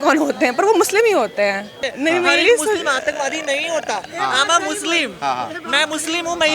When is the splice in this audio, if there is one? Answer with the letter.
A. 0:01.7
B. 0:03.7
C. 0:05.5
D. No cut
A